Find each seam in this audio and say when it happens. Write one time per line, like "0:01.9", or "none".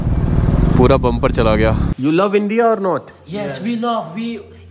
0:01.9